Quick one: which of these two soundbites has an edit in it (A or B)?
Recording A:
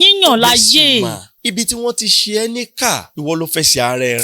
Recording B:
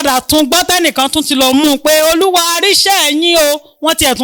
A